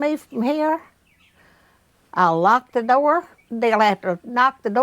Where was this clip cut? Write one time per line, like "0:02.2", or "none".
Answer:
0:03.4